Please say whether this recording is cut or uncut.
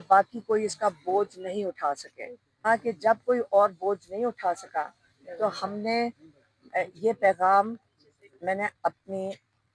cut